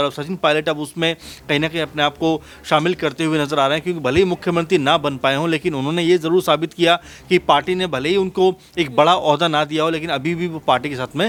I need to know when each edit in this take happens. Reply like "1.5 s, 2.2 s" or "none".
none